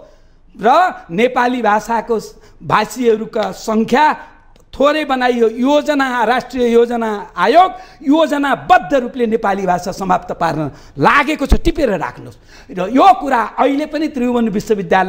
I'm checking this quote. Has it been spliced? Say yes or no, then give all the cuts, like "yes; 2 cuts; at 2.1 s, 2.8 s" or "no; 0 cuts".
no; 0 cuts